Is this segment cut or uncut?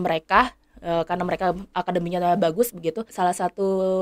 cut